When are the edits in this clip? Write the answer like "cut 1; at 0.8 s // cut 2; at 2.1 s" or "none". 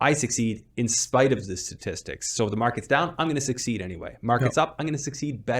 none